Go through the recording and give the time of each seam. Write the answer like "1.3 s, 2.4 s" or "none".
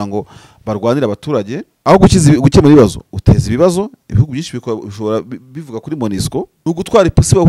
1.6 s, 6.5 s